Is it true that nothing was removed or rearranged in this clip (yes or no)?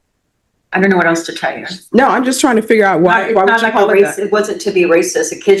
yes